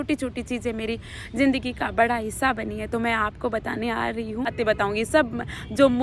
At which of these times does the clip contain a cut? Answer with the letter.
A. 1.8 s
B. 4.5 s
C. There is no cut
B